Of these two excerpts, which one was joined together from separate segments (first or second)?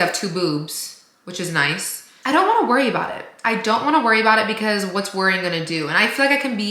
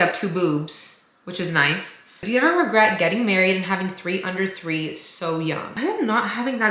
second